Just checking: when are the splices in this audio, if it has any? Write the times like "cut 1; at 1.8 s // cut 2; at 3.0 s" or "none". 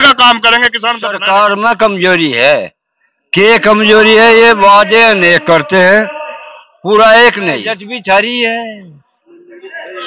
cut 1; at 1.2 s // cut 2; at 7.9 s